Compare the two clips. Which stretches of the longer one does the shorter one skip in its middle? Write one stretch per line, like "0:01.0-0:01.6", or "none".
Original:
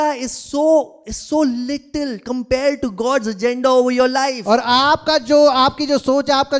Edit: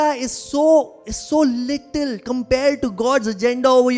none